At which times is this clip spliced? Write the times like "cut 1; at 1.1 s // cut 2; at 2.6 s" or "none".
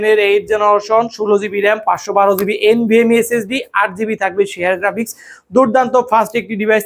none